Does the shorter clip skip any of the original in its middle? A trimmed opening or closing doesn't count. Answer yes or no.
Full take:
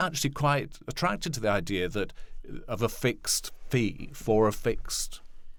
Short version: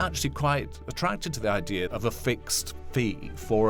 yes